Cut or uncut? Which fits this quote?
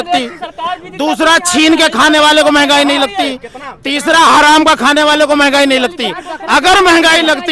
uncut